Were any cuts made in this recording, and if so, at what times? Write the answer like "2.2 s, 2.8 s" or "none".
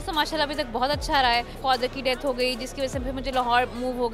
1.6 s